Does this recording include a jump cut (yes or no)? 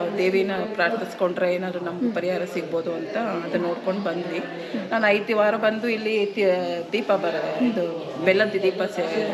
no